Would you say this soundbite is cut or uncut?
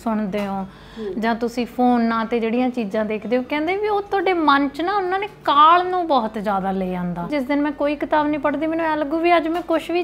cut